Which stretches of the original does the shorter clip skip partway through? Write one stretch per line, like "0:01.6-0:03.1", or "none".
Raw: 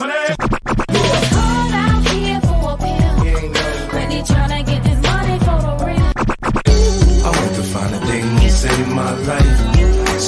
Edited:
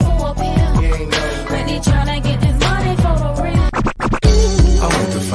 none